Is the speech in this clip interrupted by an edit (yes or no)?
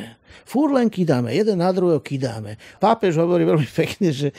yes